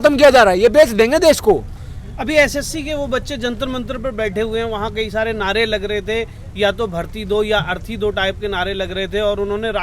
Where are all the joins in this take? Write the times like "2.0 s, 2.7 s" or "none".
none